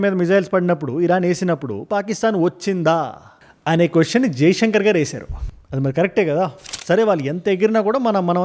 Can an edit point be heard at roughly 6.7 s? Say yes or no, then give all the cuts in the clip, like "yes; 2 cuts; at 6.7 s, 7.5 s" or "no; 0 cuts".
yes; 1 cut; at 6.7 s